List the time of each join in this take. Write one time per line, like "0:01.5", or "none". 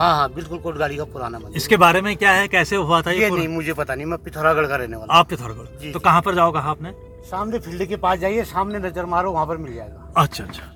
none